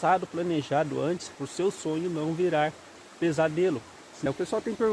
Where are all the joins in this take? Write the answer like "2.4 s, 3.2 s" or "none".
1.4 s, 4.3 s